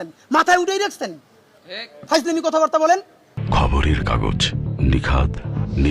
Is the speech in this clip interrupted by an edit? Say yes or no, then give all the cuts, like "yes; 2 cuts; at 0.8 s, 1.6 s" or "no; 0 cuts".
no; 0 cuts